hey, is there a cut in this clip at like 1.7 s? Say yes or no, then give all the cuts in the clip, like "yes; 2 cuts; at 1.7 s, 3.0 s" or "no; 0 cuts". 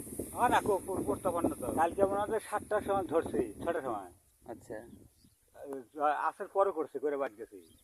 yes; 1 cut; at 1.7 s